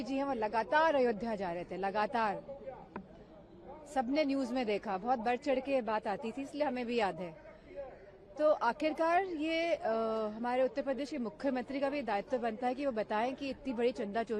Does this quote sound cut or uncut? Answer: uncut